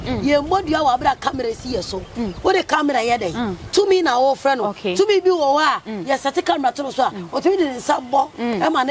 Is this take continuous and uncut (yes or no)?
yes